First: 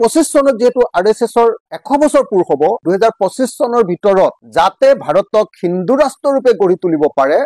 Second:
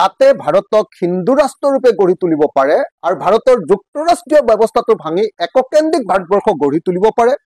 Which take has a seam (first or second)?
first